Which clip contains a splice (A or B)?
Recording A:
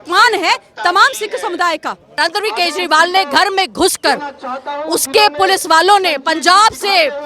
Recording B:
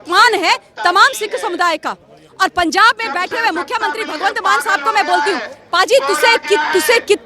A